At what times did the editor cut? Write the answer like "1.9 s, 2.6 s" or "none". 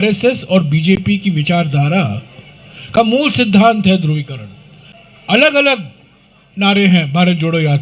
none